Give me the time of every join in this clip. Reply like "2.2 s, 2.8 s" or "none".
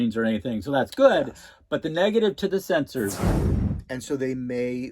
3.5 s